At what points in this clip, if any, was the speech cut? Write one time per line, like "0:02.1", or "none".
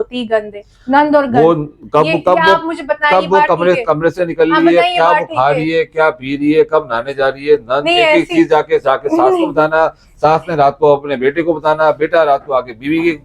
none